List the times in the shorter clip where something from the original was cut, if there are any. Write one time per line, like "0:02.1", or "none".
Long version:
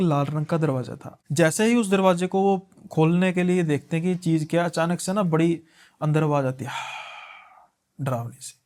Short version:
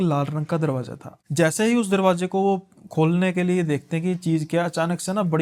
none